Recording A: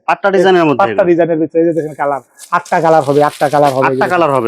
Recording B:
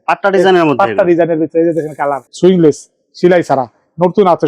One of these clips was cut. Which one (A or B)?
B